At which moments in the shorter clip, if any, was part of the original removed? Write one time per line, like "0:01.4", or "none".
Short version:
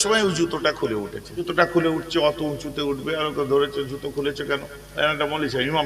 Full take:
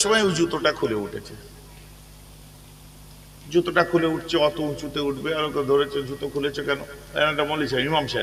0:01.5